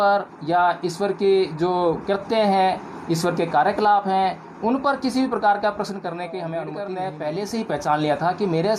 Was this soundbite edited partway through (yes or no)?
yes